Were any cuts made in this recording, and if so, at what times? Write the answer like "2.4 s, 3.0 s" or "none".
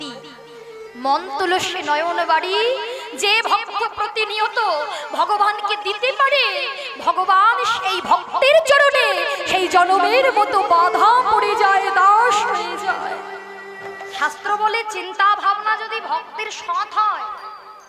14.2 s